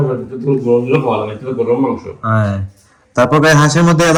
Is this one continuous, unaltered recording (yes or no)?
yes